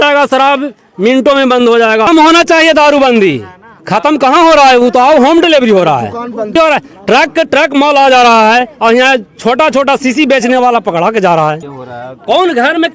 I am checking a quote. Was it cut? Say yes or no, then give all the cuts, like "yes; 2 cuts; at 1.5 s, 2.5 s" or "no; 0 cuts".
yes; 3 cuts; at 2.1 s, 6.5 s, 11.7 s